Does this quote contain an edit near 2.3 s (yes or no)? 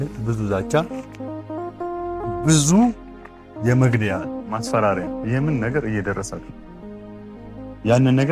yes